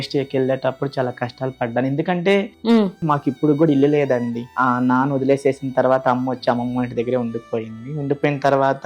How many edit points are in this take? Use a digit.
2